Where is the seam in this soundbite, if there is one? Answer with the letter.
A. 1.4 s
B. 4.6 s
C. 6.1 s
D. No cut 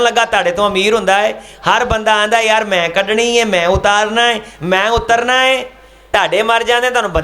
C